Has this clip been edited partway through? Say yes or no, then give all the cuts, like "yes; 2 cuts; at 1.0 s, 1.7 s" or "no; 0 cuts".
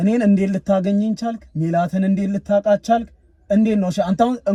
no; 0 cuts